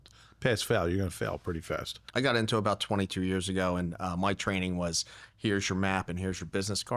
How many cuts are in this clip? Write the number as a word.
one